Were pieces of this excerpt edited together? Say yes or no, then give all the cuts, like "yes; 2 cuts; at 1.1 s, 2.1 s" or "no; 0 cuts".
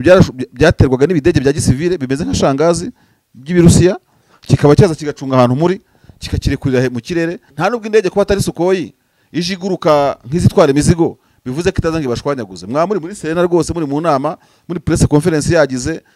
yes; 1 cut; at 7.5 s